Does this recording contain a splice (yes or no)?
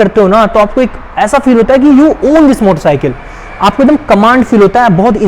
no